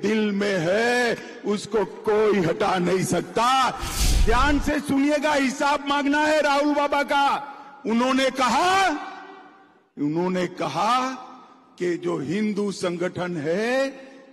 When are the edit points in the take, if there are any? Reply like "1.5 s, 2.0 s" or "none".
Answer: 3.9 s